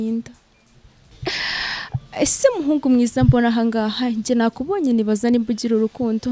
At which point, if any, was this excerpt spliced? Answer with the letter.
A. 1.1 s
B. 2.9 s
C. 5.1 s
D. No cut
A